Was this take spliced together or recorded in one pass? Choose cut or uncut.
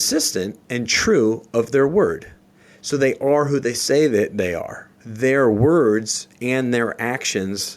cut